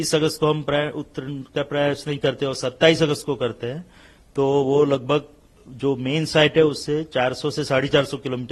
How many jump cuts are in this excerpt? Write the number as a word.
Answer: zero